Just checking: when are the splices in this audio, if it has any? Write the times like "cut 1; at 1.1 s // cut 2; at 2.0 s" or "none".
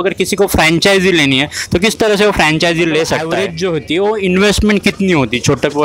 cut 1; at 3.4 s